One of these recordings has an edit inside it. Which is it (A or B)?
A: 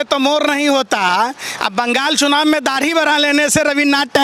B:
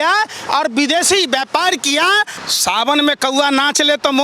B